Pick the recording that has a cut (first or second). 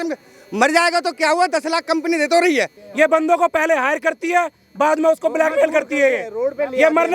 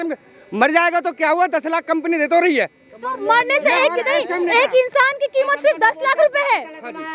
first